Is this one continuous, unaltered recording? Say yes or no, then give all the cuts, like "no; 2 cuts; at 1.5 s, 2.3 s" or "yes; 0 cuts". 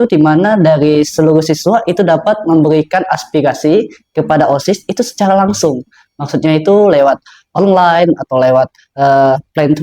yes; 0 cuts